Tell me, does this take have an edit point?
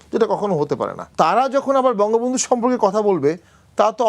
yes; 1 cut; at 1.1 s

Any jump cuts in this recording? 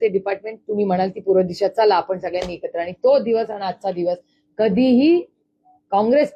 no; 0 cuts

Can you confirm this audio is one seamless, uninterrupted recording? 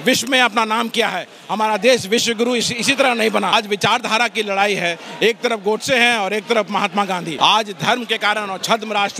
no; 2 cuts; at 3.5 s, 7.3 s

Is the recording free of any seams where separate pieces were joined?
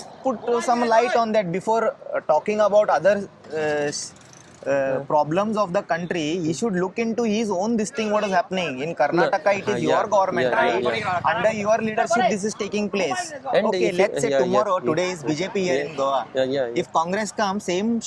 yes; 0 cuts

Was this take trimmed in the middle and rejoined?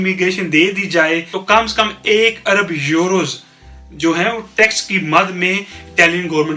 yes; 1 cut; at 1.4 s

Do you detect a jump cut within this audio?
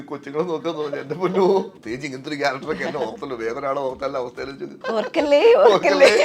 yes; 2 cuts; at 1.7 s, 4.7 s

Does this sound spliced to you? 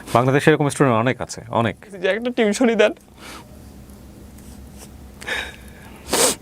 yes; 1 cut; at 2.0 s

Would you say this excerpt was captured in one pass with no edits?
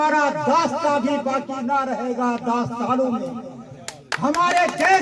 yes; 0 cuts

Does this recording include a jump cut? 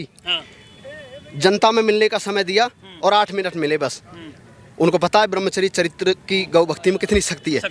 no; 0 cuts

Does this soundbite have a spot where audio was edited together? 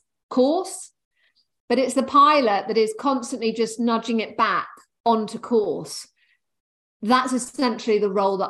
no; 0 cuts

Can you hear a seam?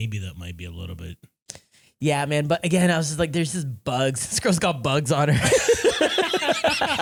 no; 0 cuts

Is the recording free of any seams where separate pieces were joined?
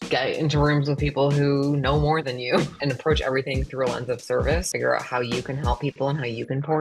no; 2 cuts; at 2.7 s, 4.7 s

